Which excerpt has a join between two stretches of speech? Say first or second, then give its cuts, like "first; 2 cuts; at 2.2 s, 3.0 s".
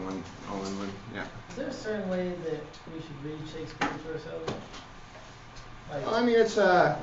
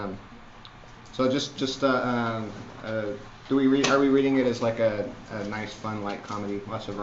second; 1 cut; at 5.6 s